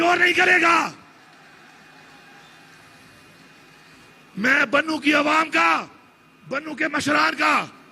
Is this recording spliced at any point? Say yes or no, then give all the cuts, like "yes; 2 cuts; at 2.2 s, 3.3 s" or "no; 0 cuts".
no; 0 cuts